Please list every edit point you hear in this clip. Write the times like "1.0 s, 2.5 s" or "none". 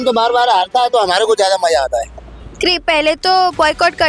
2.2 s